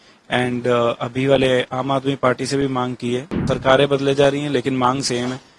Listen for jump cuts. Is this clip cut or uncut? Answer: cut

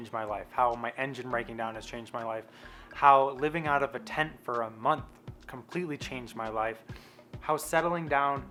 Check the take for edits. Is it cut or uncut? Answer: uncut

